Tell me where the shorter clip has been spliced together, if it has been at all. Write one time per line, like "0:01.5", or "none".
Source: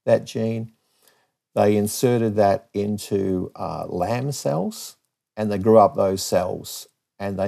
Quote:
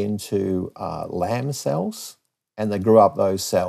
none